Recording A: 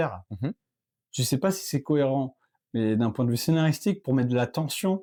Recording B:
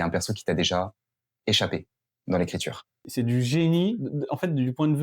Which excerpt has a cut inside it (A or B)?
B